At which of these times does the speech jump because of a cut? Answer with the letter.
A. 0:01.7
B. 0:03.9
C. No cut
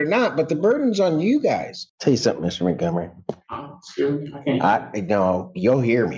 A